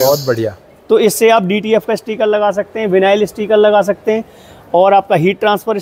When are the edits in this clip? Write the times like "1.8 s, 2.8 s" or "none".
none